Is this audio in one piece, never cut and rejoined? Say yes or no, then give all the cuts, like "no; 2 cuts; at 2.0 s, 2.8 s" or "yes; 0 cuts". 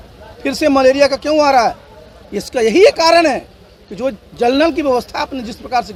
yes; 0 cuts